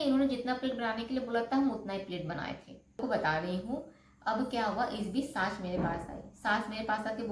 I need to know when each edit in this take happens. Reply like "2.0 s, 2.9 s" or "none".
2.9 s